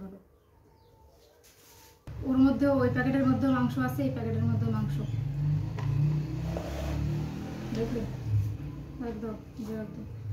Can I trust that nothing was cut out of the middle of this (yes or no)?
no